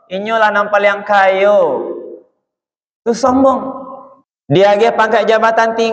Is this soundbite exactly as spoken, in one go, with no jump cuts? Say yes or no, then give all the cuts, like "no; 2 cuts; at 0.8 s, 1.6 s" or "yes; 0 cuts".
no; 1 cut; at 4.6 s